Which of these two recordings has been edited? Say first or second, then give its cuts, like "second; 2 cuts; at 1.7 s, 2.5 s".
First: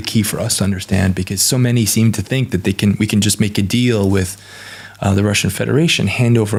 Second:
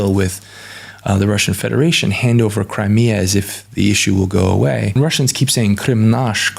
second; 1 cut; at 5.0 s